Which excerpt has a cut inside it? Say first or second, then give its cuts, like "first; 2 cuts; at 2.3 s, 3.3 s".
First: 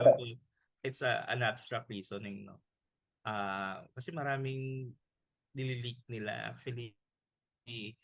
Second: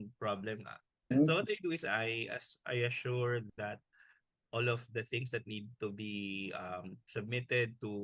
second; 2 cuts; at 1.1 s, 1.8 s